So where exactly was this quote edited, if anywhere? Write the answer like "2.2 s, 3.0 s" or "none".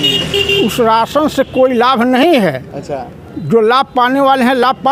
none